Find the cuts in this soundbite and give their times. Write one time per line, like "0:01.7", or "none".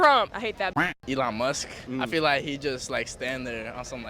0:00.9
0:01.7